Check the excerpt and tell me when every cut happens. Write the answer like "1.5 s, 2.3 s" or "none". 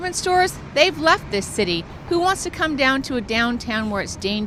none